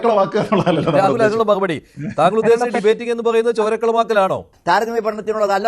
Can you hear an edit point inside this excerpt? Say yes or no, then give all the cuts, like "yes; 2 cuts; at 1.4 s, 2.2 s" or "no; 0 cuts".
yes; 1 cut; at 4.5 s